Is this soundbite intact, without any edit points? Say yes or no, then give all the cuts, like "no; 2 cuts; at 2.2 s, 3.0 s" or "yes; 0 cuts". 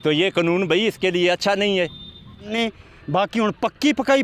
no; 1 cut; at 2.5 s